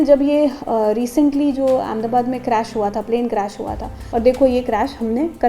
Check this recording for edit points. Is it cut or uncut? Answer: cut